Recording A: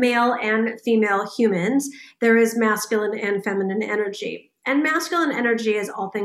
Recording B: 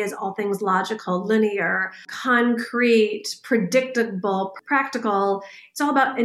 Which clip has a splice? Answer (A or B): B